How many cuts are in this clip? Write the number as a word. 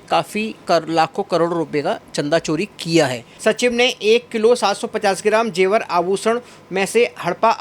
one